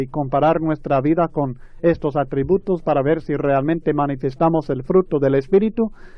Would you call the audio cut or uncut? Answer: uncut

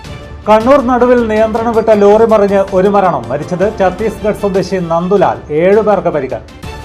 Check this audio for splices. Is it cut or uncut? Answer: uncut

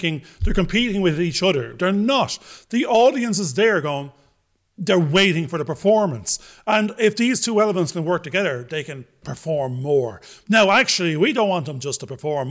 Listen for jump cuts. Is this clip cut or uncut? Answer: uncut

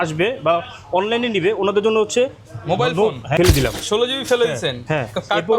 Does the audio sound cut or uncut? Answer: cut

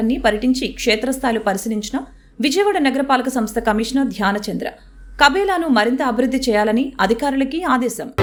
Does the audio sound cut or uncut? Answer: uncut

